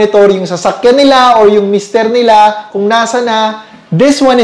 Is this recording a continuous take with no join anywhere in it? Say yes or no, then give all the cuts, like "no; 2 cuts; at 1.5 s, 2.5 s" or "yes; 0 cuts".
yes; 0 cuts